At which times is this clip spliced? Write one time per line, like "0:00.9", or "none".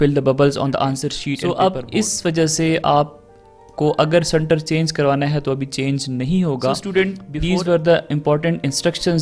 0:01.4
0:07.2